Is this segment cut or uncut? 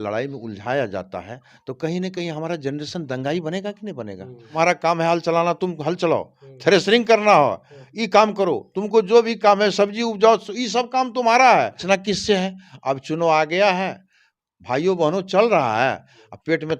cut